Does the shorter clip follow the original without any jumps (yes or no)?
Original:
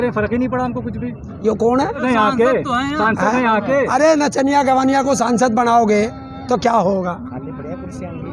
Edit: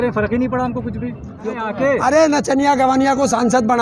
no